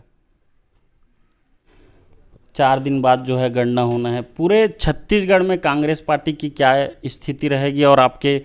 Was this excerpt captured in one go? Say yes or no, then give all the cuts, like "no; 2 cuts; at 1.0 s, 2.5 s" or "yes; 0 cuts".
no; 1 cut; at 1.7 s